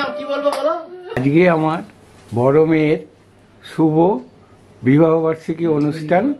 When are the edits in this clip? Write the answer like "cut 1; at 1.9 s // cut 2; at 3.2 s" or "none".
cut 1; at 1.2 s